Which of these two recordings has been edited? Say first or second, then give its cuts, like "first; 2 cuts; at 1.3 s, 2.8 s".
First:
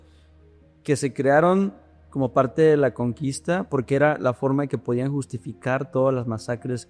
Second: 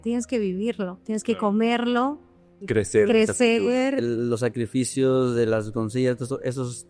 second; 2 cuts; at 2.6 s, 4.0 s